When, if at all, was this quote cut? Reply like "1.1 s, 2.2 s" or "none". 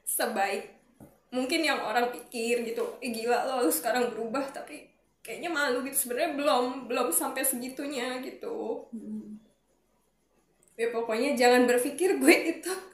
none

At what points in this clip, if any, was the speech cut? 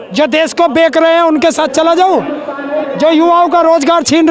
none

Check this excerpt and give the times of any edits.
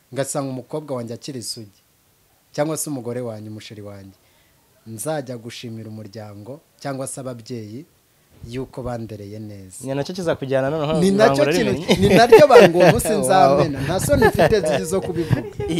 none

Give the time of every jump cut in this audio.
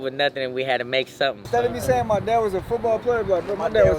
1.4 s

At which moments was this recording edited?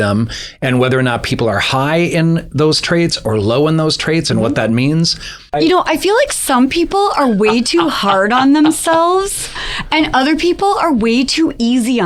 5.6 s

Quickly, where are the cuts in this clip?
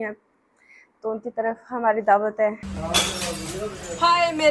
2.6 s

